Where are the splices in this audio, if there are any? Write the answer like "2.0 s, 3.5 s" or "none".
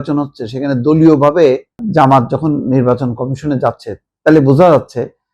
1.8 s